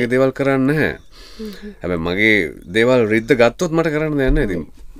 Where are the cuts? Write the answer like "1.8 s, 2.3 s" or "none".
none